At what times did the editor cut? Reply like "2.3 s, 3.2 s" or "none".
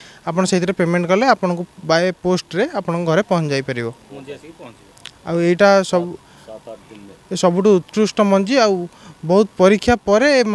none